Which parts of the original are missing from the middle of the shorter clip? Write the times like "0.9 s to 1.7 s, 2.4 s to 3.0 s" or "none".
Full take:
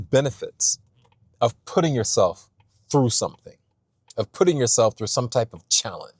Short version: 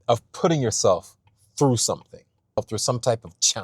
4.0 s to 4.9 s